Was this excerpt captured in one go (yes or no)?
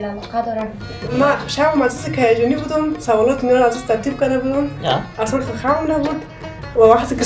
no